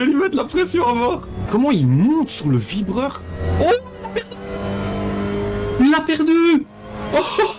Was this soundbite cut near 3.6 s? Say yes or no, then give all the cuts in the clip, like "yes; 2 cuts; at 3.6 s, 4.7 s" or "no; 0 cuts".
no; 1 cut; at 1.3 s